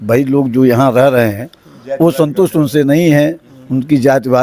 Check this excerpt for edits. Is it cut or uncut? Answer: uncut